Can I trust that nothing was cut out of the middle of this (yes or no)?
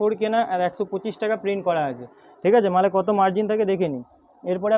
yes